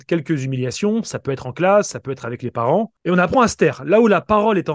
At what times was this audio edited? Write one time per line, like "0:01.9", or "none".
0:03.0